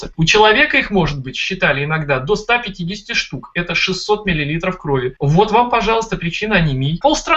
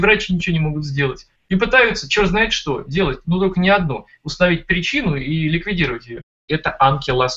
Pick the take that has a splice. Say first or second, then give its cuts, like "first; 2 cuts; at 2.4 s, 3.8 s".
second; 1 cut; at 6.4 s